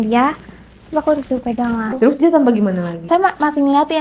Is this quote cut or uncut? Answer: cut